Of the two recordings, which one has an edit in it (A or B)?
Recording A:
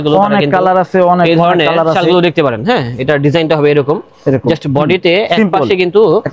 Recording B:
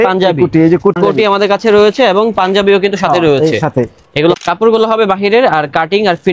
B